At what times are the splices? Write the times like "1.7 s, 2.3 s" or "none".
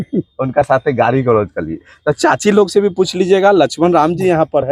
none

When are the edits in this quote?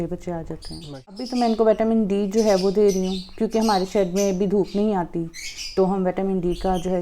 1.2 s

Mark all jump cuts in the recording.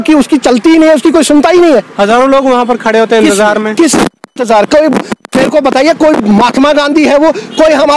none

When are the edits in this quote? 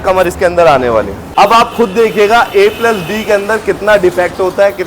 1.2 s

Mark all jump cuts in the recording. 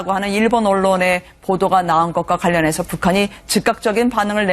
2.7 s

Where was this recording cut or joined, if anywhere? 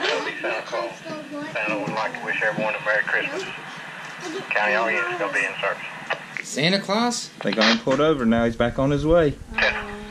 none

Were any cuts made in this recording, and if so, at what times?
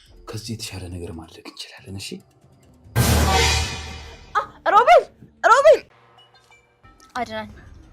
6.0 s

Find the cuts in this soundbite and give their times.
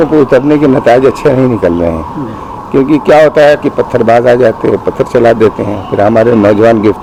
none

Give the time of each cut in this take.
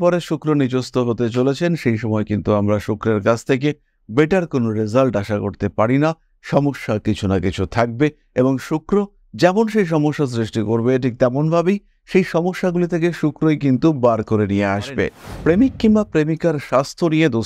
15.2 s

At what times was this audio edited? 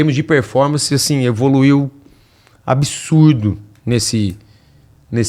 none

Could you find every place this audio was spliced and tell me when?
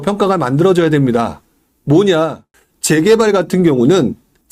2.4 s

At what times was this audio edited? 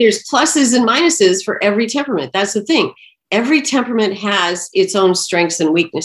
none

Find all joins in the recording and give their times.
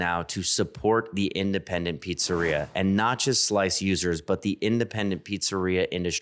none

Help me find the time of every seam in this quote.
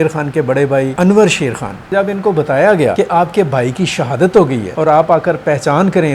0.9 s, 1.9 s, 2.9 s, 4.6 s

